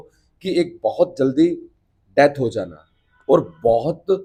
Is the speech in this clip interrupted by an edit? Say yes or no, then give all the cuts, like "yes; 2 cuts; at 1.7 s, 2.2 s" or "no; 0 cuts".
no; 0 cuts